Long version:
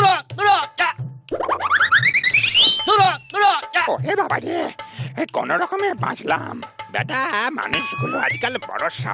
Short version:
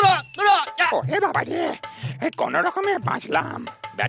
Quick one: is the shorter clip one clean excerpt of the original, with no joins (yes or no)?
no